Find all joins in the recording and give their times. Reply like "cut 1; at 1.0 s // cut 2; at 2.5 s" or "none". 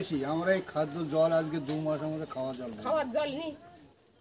none